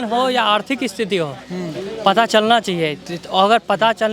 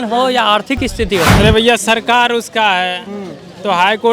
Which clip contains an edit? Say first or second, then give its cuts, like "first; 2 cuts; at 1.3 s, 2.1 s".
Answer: second; 1 cut; at 1.3 s